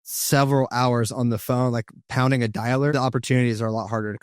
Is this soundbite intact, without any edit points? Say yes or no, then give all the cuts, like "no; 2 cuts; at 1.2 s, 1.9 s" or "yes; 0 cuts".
no; 1 cut; at 2.9 s